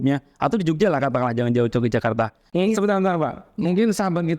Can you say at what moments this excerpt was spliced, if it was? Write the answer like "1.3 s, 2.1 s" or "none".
2.4 s